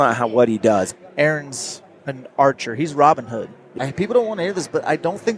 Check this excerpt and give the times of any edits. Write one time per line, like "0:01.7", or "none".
0:00.9
0:03.7